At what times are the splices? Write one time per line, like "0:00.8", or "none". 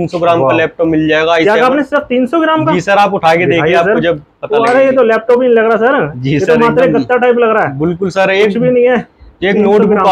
none